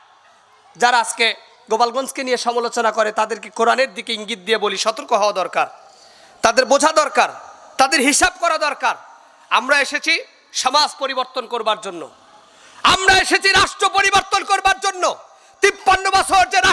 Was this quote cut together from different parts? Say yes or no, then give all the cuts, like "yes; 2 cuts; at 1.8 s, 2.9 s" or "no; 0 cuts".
no; 0 cuts